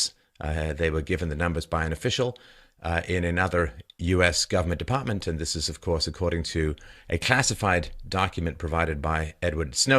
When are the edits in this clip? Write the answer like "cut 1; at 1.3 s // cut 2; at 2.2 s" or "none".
none